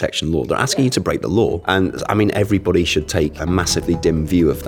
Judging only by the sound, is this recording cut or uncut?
cut